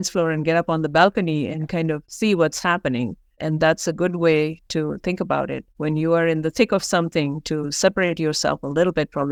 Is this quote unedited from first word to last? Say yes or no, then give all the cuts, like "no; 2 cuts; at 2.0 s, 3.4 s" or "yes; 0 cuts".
yes; 0 cuts